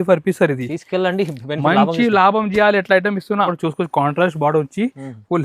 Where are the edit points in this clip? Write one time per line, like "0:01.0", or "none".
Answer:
0:03.5